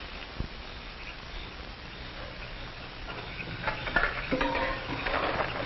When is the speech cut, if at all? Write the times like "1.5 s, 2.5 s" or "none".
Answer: 3.6 s

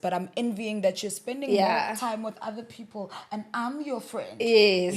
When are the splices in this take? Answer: none

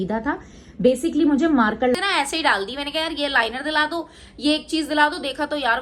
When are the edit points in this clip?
1.9 s

